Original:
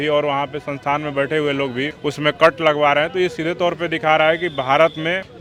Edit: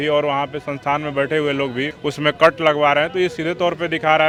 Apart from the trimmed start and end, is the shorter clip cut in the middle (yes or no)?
no